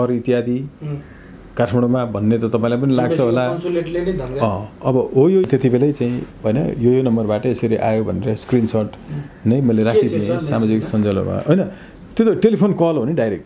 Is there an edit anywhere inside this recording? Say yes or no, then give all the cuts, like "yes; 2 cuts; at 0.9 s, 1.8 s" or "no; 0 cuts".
yes; 1 cut; at 5.4 s